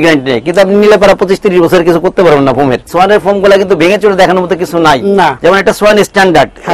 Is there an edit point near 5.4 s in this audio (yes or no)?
yes